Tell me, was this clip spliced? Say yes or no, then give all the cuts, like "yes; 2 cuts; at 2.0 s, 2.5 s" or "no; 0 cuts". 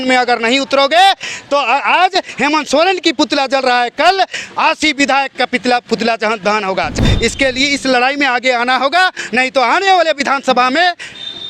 yes; 1 cut; at 7.0 s